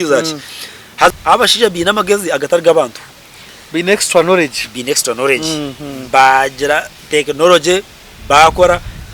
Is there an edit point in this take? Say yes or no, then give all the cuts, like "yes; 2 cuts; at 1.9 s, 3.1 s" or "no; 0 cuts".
yes; 1 cut; at 1.1 s